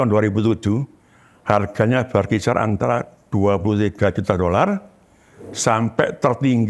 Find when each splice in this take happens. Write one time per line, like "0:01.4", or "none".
none